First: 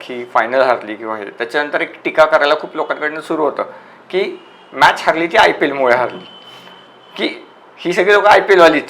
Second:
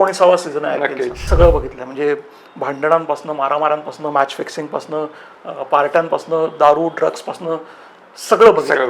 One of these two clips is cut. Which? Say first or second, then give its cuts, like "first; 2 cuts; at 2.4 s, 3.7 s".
second; 1 cut; at 1.2 s